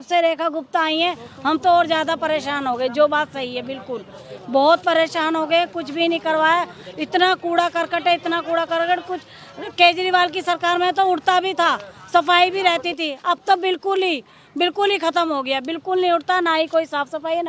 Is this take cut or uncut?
uncut